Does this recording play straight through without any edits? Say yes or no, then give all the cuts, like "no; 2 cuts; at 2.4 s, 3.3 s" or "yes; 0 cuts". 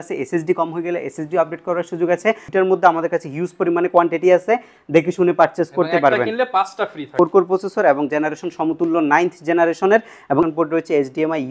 no; 3 cuts; at 2.4 s, 7.1 s, 10.4 s